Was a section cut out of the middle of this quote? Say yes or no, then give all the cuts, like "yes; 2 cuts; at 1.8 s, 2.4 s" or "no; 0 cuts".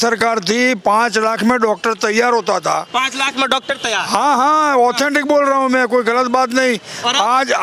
no; 0 cuts